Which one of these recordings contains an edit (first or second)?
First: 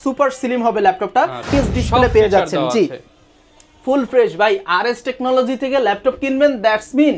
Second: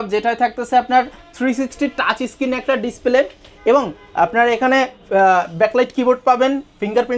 first